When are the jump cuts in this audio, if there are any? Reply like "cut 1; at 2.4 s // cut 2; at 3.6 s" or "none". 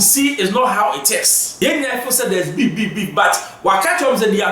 cut 1; at 1.4 s